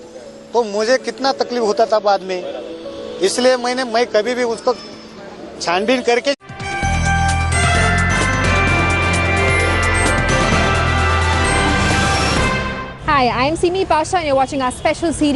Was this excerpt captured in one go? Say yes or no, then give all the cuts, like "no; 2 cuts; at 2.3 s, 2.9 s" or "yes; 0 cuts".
yes; 0 cuts